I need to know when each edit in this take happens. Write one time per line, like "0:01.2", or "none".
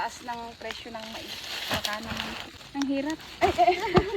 0:02.6